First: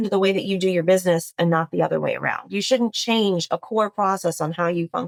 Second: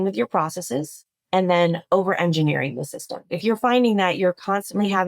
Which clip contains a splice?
second; 1 cut; at 3.4 s

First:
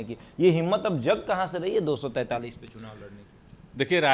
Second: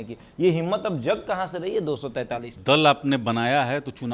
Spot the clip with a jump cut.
second; 1 cut; at 2.6 s

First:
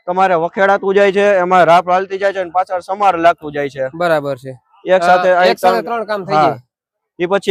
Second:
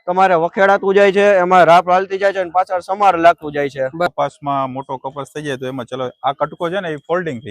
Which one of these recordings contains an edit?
second; 2 cuts; at 4.1 s, 5.7 s

